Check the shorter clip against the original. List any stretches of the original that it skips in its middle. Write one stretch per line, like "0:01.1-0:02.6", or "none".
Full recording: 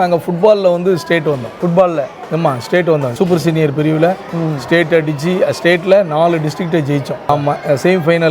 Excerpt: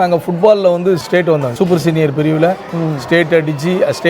0:01.0-0:02.6